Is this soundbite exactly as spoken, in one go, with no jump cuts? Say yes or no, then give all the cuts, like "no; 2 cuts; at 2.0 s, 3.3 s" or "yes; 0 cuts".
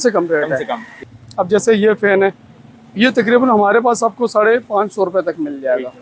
no; 1 cut; at 1.0 s